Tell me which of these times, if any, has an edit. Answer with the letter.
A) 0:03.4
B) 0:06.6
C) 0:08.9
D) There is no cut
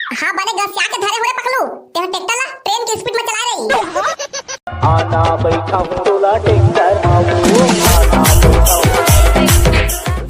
C